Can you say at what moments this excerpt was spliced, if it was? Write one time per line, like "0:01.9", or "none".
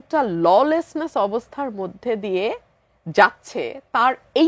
none